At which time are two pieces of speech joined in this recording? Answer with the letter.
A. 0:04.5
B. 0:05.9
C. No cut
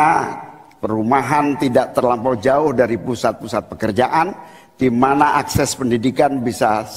C